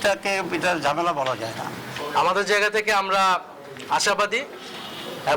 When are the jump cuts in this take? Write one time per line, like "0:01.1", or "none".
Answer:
0:01.9